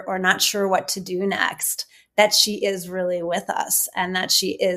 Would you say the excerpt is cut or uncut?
uncut